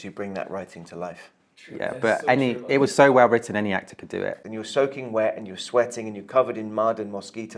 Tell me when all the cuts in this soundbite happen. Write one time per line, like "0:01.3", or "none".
0:04.4